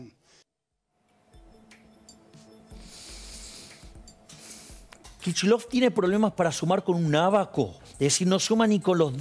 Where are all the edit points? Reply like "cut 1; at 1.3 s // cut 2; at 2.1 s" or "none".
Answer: cut 1; at 5.0 s // cut 2; at 7.8 s